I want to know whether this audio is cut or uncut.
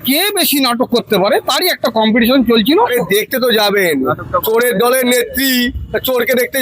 cut